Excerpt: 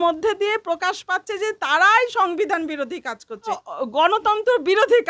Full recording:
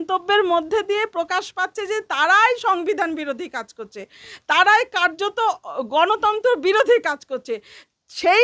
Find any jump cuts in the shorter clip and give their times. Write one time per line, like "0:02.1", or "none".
0:03.6